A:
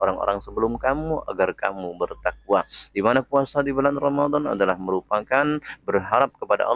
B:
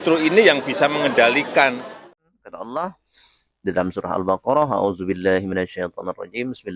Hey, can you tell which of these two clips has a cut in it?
B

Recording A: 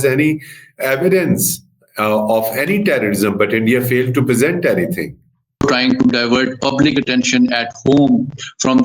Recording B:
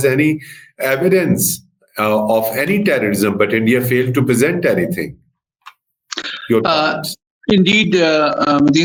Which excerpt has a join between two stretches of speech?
A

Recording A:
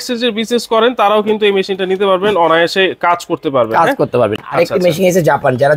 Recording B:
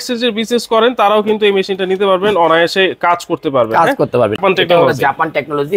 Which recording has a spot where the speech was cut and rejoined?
B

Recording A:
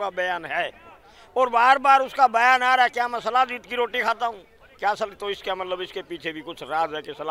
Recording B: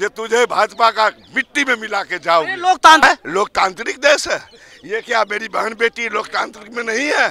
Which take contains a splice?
B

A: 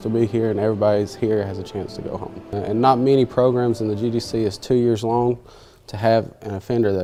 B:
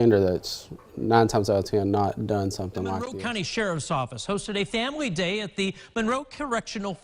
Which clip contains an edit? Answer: B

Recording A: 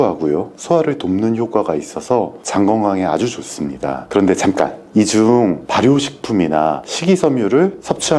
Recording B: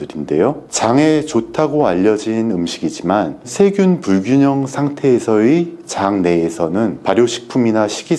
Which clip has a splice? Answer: A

